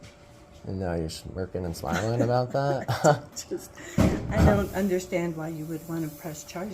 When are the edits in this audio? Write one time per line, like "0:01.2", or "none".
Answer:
0:05.5